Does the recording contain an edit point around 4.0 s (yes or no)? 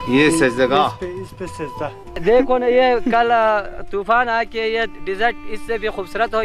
no